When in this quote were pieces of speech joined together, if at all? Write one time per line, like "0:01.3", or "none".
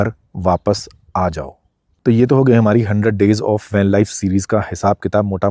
none